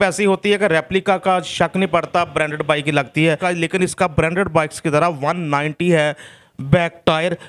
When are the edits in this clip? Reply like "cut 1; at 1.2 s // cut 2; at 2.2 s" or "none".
cut 1; at 3.4 s